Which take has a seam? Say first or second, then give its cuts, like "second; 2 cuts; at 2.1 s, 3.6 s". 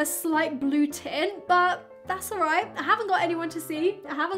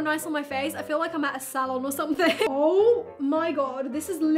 second; 1 cut; at 2.5 s